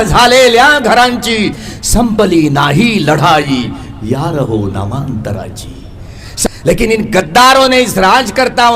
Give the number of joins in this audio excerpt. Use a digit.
1